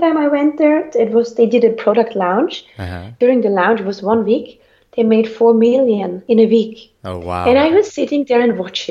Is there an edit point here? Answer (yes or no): yes